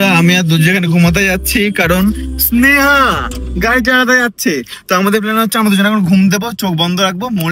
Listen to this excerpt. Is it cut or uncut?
uncut